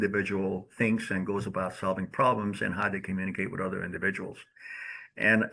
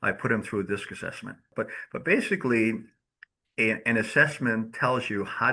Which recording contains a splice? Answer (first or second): second